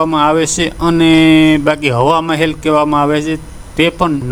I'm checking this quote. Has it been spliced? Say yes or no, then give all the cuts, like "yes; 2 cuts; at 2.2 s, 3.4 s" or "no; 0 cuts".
no; 0 cuts